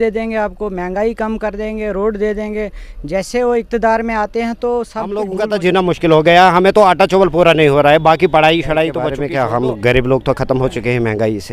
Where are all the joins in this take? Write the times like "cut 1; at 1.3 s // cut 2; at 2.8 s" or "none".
cut 1; at 5.3 s // cut 2; at 9.2 s